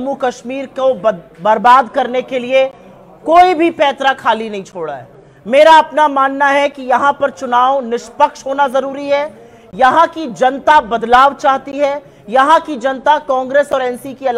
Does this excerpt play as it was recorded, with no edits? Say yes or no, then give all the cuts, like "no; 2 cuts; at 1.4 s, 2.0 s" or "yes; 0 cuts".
yes; 0 cuts